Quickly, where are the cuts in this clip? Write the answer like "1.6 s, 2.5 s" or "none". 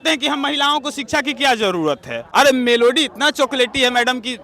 2.1 s